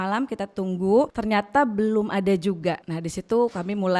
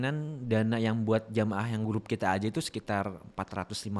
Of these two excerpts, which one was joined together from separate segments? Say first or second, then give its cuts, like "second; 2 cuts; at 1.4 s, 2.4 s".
first; 2 cuts; at 1.2 s, 2.9 s